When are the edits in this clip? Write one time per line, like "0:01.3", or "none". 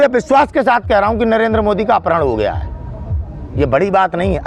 none